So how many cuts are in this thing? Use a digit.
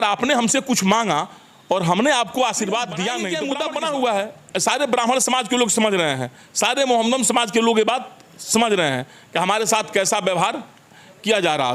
1